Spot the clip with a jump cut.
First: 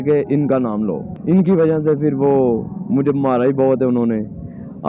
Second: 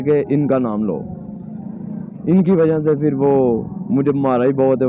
first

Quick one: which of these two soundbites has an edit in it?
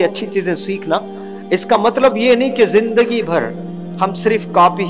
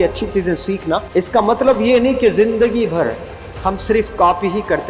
second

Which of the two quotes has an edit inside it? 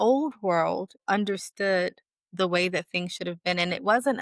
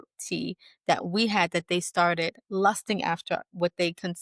first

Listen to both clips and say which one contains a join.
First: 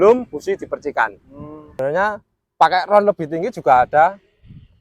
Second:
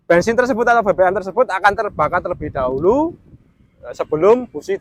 first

